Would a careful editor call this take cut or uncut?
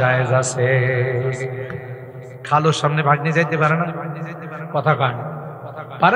uncut